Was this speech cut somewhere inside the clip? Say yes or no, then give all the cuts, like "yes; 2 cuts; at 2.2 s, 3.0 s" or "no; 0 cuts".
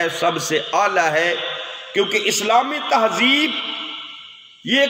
no; 0 cuts